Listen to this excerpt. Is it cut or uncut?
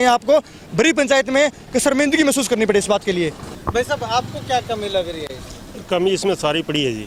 uncut